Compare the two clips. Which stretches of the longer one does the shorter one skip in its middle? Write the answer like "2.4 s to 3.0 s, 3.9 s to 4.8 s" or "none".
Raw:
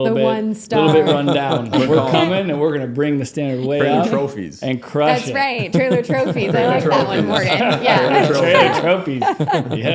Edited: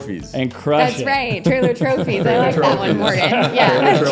none